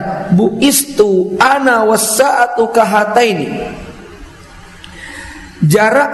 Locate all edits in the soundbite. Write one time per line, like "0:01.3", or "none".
none